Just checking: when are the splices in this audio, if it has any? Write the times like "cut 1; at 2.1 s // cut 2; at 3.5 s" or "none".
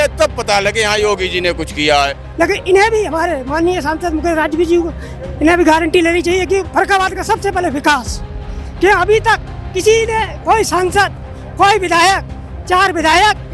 cut 1; at 2.2 s

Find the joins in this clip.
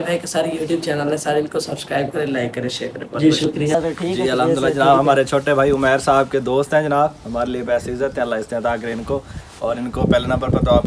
cut 1; at 3.8 s

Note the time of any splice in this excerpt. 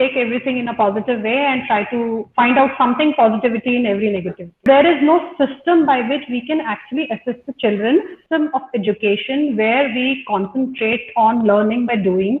cut 1; at 4.7 s // cut 2; at 8.2 s

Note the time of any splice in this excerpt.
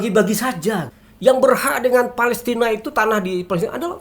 cut 1; at 0.9 s

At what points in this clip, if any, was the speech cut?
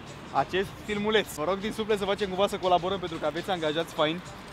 none

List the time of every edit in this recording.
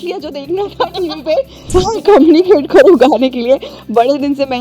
cut 1; at 1.7 s

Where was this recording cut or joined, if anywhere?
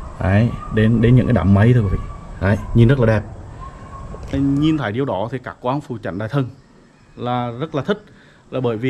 cut 1; at 4.3 s

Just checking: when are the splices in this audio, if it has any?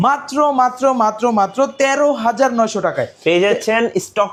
none

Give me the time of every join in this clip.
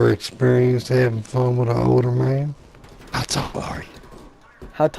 cut 1; at 2.5 s

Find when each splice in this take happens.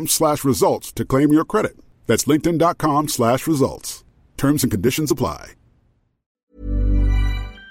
cut 1; at 6.5 s

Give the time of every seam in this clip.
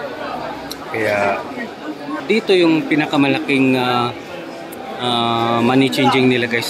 cut 1; at 2.2 s

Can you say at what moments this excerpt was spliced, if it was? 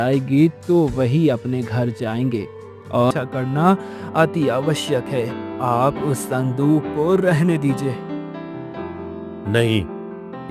cut 1; at 3.1 s

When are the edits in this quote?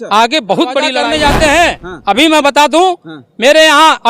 cut 1; at 1.0 s

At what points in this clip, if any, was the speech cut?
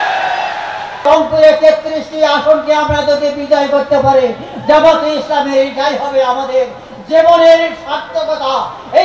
cut 1; at 1.1 s

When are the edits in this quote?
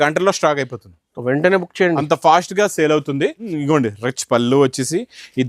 cut 1; at 3.5 s

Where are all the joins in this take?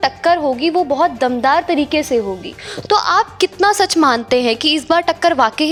none

